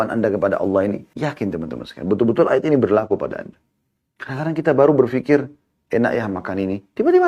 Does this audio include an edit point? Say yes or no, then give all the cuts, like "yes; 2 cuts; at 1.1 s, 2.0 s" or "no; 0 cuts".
yes; 1 cut; at 1.1 s